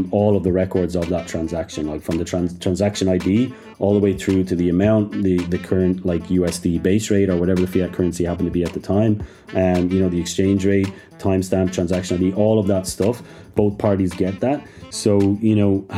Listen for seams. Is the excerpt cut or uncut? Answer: uncut